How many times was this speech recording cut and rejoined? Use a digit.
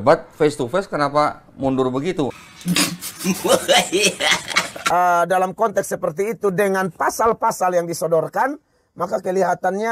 1